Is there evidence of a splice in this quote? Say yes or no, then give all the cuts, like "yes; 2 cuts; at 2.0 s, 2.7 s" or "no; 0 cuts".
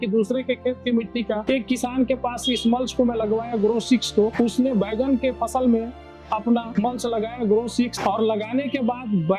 yes; 1 cut; at 1.4 s